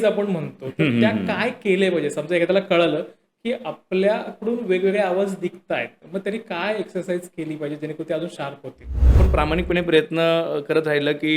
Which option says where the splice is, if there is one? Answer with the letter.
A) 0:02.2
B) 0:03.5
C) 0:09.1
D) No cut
C